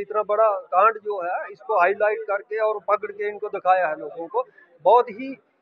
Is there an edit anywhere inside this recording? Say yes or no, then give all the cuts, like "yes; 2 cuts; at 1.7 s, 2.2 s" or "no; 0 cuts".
no; 0 cuts